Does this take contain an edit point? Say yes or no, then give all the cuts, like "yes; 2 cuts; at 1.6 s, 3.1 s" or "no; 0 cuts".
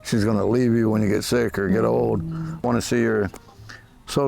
yes; 1 cut; at 2.6 s